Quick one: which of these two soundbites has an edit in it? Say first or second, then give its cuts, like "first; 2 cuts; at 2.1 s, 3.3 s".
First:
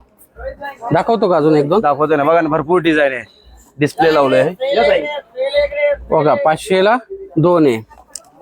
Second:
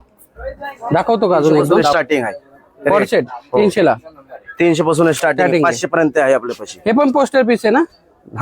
second; 1 cut; at 1.9 s